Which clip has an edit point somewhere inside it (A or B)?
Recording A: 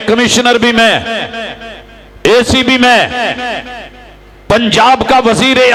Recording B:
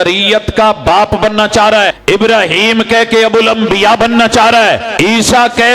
B